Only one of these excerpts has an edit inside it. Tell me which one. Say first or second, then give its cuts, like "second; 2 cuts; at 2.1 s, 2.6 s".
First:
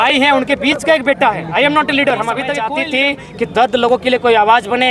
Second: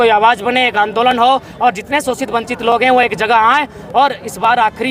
first; 1 cut; at 2.6 s